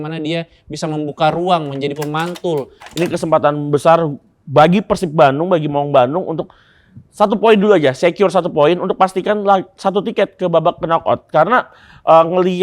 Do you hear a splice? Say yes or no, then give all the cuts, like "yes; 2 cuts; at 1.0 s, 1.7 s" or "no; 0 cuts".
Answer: yes; 1 cut; at 2.8 s